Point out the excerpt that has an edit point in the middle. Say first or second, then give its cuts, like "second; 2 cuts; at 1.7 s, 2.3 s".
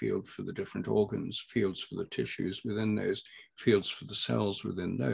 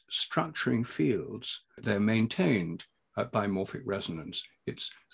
second; 1 cut; at 1.8 s